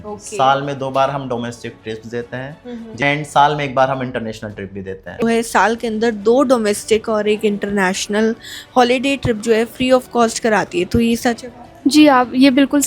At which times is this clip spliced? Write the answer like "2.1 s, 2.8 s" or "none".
3.0 s, 5.2 s